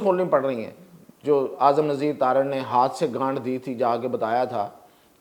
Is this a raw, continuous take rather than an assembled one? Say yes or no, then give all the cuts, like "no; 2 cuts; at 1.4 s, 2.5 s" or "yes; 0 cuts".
yes; 0 cuts